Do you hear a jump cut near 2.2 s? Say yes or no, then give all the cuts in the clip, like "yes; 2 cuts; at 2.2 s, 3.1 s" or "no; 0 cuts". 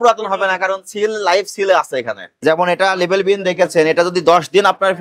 yes; 1 cut; at 2.2 s